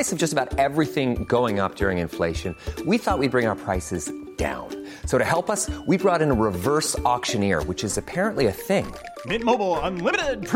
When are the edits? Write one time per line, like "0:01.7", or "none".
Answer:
none